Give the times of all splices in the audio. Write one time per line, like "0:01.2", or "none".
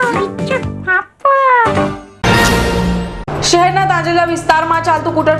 0:02.1